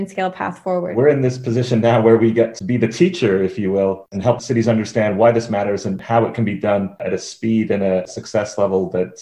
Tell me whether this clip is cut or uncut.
cut